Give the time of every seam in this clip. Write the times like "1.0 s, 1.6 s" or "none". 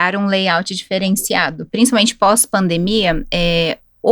1.6 s